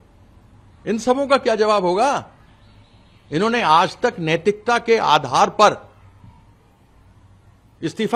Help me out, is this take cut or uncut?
uncut